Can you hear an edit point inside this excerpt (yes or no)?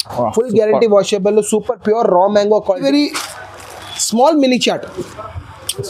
yes